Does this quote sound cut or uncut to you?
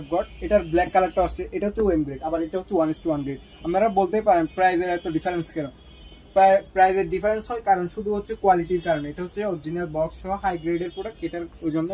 uncut